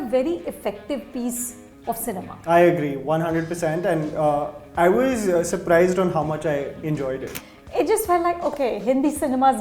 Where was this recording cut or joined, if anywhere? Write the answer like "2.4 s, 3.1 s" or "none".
7.3 s